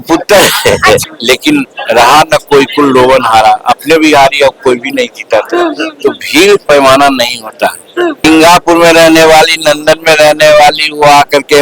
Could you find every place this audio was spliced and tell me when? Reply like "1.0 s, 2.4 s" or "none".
1.0 s, 8.2 s